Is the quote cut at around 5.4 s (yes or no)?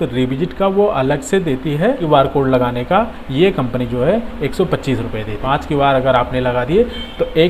yes